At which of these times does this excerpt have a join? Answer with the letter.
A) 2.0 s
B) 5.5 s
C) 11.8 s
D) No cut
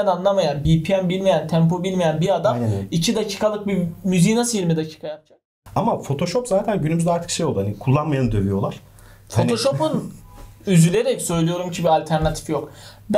B